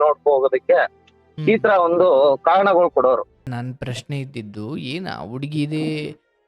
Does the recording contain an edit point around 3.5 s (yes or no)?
yes